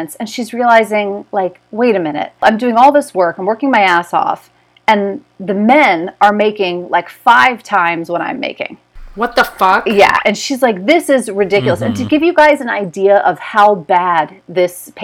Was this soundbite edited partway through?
no; 0 cuts

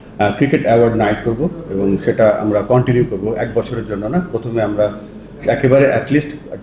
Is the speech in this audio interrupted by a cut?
no; 0 cuts

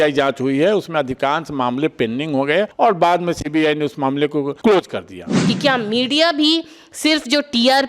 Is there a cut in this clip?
yes; 3 cuts; at 2.7 s, 4.5 s, 5.3 s

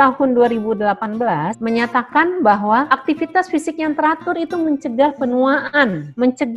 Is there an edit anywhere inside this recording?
yes; 2 cuts; at 1.5 s, 2.9 s

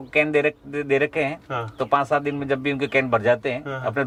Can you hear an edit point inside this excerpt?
no; 0 cuts

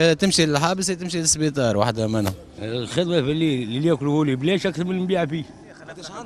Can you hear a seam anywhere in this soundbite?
yes; 1 cut; at 2.5 s

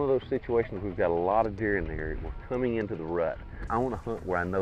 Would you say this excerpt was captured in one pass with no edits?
no; 1 cut; at 3.7 s

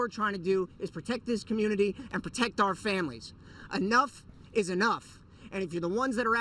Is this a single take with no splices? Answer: no; 2 cuts; at 3.1 s, 5.0 s

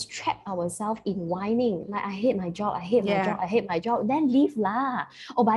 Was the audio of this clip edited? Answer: no; 0 cuts

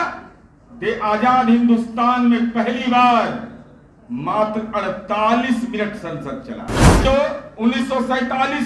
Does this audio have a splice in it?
yes; 1 cut; at 7.0 s

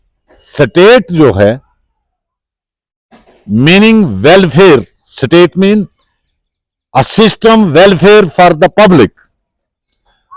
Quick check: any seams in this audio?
no; 0 cuts

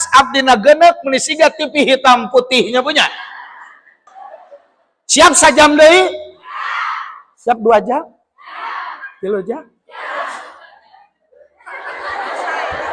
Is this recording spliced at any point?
yes; 1 cut; at 4.1 s

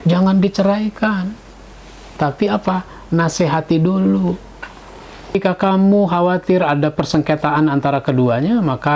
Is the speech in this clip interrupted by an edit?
yes; 1 cut; at 5.3 s

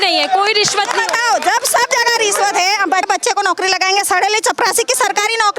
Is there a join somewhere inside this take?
yes; 1 cut; at 3.1 s

